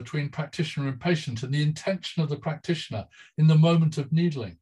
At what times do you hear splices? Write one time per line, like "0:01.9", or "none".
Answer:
none

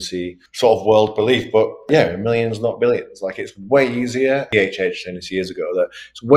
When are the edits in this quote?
0:04.5

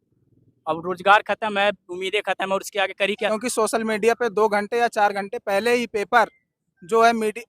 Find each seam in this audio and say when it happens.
0:03.3

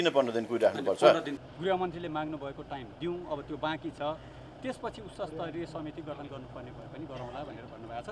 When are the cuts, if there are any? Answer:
0:01.4

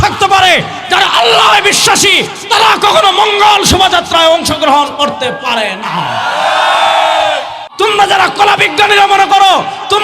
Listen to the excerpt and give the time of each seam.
0:07.6

